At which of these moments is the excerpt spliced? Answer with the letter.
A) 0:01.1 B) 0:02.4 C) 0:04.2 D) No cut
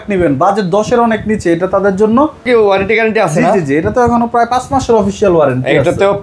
B